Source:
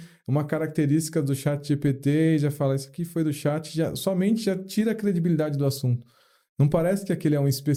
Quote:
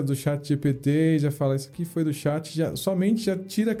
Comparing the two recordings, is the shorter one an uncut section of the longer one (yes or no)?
yes